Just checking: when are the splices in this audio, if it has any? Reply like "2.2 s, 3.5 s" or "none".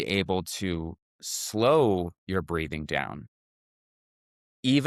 none